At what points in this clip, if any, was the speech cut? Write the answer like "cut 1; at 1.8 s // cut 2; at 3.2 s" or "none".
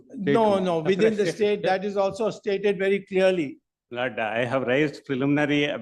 none